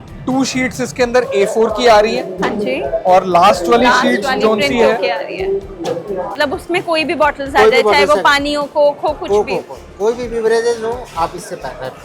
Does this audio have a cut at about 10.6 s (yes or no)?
no